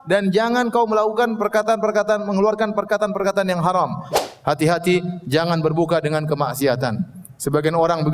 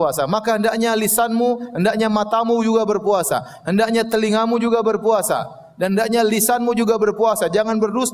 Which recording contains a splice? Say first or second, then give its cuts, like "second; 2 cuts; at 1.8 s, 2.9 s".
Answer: first; 1 cut; at 4.1 s